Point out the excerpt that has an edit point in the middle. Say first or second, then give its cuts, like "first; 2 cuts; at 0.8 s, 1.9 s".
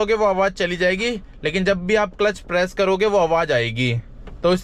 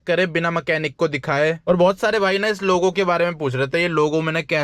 second; 1 cut; at 1.6 s